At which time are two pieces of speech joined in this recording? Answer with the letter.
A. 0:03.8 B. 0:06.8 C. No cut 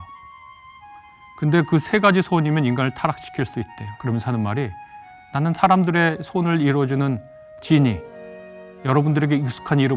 A